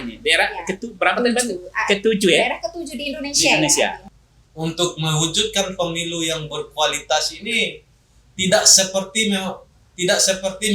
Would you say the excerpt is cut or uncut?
cut